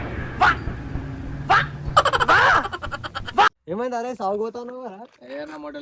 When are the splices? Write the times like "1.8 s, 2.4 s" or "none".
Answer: 3.5 s